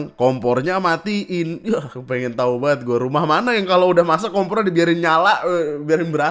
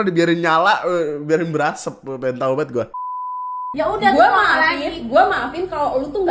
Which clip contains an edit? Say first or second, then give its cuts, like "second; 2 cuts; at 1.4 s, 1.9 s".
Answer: second; 1 cut; at 3.6 s